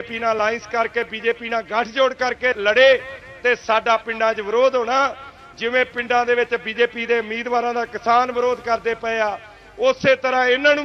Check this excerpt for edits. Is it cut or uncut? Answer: cut